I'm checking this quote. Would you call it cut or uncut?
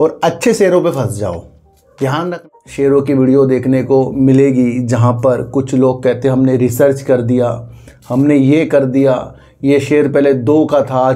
cut